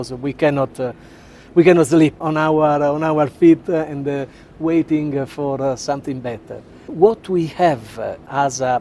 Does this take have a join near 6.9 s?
yes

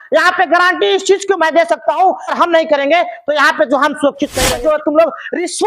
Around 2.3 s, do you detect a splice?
yes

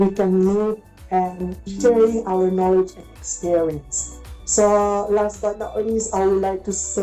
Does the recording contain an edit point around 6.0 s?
yes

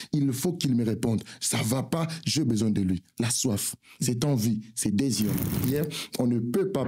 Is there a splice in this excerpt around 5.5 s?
yes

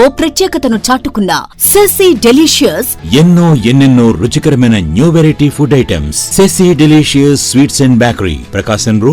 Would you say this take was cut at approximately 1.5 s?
no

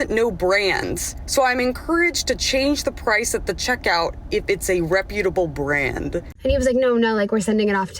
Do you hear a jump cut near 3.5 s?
no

